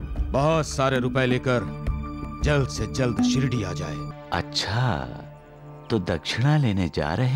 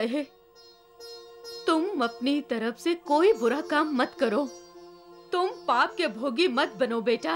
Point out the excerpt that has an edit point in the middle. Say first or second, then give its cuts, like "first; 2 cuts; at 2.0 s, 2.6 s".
first; 1 cut; at 4.1 s